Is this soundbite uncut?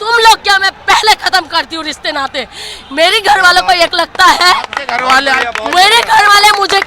yes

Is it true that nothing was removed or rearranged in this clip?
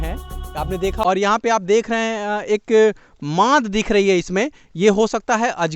no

